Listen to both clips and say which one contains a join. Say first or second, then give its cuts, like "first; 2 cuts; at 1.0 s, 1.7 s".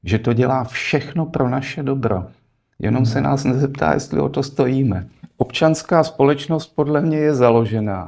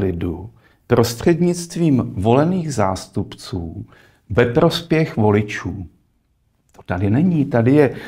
first; 1 cut; at 5.2 s